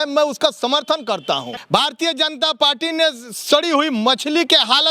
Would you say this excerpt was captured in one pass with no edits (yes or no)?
no